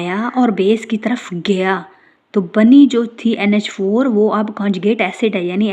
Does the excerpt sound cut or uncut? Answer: uncut